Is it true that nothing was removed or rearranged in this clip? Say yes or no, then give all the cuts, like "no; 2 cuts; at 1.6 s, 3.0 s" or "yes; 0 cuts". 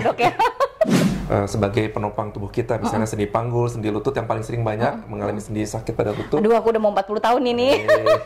no; 1 cut; at 1.1 s